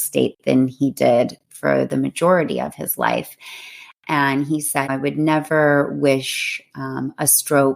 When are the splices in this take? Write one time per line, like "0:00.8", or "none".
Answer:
0:04.9